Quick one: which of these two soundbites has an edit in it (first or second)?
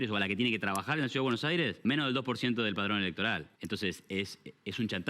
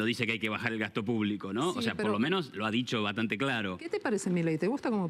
first